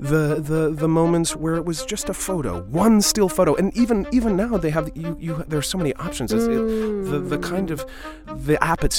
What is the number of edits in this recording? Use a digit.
1